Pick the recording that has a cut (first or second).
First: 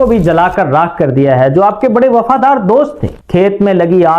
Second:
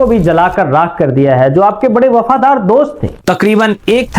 second